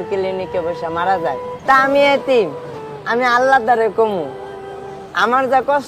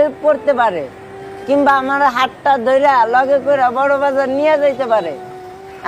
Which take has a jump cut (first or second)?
first